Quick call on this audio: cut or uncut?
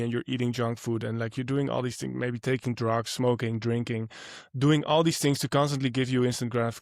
uncut